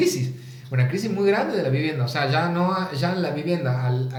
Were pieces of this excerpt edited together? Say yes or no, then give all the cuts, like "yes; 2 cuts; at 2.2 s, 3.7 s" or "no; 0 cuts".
no; 0 cuts